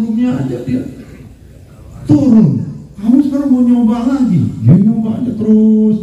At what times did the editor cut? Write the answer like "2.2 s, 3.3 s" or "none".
2.9 s, 4.5 s

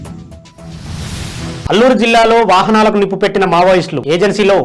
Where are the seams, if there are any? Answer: 1.6 s

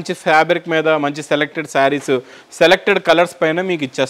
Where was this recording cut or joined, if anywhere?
none

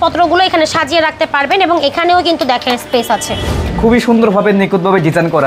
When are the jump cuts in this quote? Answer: 3.7 s

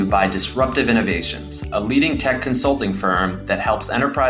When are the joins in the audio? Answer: none

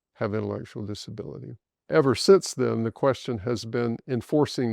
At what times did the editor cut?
1.8 s

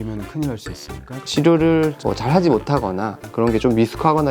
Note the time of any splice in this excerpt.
1.2 s

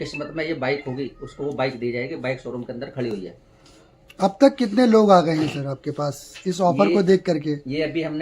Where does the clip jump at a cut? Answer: none

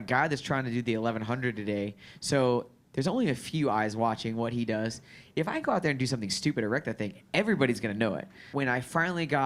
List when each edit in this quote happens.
8.4 s

